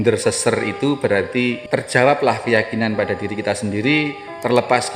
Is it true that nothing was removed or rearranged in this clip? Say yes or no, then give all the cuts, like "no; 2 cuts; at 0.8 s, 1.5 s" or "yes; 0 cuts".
no; 1 cut; at 1.6 s